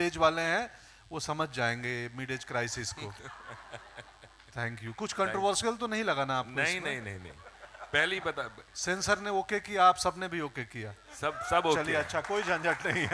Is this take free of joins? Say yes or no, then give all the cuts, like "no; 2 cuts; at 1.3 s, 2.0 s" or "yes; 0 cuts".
yes; 0 cuts